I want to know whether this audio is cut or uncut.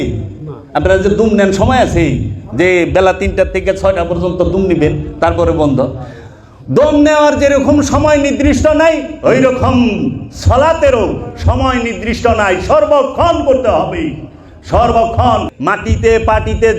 cut